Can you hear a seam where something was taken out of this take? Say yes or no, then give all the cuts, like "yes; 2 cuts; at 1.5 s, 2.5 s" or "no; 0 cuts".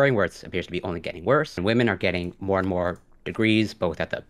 yes; 1 cut; at 1.6 s